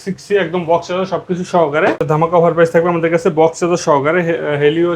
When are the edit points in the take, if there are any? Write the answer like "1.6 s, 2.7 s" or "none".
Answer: 2.0 s